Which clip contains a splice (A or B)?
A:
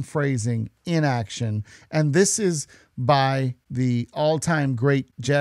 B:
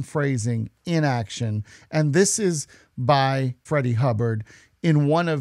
B